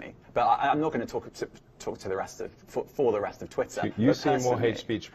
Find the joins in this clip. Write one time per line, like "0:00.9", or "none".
none